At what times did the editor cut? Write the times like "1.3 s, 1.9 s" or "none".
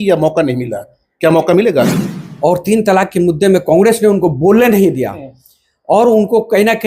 2.0 s